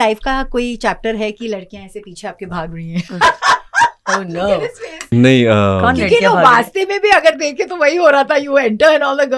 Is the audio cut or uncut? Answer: cut